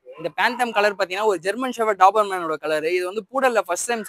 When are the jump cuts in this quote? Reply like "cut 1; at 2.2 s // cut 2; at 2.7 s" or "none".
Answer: none